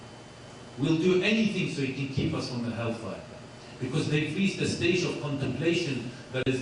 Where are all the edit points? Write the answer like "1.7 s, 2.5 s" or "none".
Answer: 4.5 s